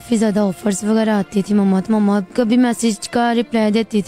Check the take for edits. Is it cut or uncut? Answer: cut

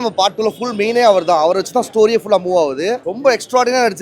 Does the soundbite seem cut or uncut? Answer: cut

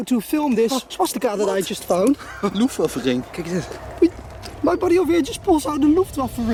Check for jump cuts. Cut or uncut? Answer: uncut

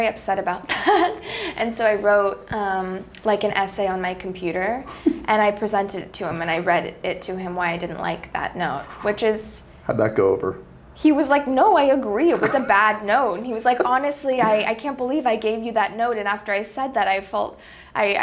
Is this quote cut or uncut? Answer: uncut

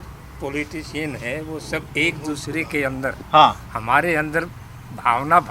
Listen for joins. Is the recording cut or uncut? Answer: uncut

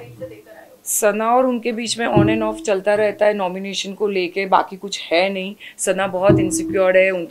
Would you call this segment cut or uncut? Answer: uncut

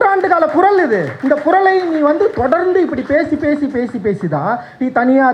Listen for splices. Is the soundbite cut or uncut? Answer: cut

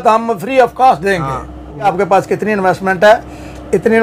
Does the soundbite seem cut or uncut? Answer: cut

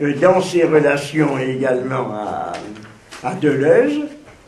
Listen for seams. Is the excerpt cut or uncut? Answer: uncut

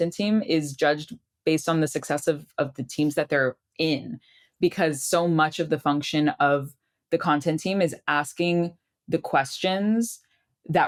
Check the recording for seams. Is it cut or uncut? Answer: uncut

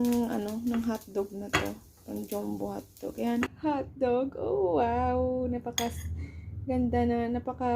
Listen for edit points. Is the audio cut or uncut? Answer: cut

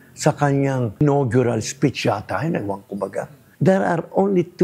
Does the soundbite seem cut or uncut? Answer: cut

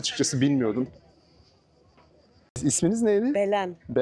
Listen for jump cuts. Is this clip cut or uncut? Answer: uncut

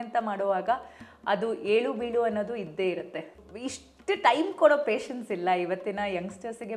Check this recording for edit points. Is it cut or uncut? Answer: cut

